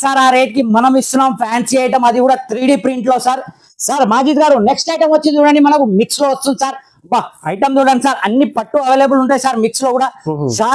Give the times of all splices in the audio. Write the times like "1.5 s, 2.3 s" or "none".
none